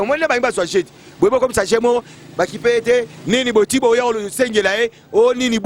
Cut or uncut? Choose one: uncut